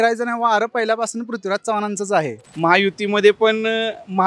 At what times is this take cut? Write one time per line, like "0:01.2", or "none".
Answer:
0:02.4